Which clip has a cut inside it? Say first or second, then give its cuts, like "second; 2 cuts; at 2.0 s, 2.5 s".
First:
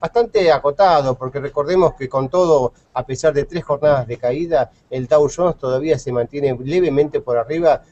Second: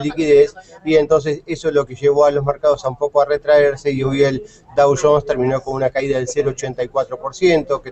second; 1 cut; at 6.8 s